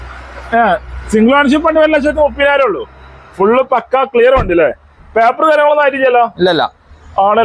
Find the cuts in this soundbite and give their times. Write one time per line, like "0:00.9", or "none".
none